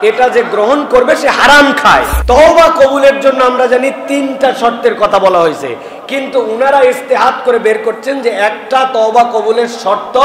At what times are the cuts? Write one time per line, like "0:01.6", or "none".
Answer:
0:02.1